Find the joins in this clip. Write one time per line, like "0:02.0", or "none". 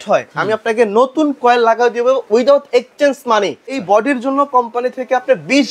0:02.3
0:03.8